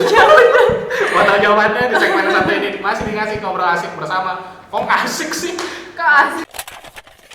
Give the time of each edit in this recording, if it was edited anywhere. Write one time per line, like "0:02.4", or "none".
0:06.4